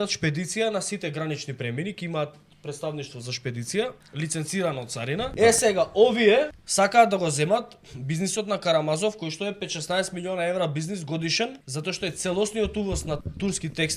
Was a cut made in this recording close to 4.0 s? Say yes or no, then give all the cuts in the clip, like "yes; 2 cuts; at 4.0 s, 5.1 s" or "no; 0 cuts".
yes; 5 cuts; at 4.0 s, 5.3 s, 6.6 s, 11.7 s, 13.2 s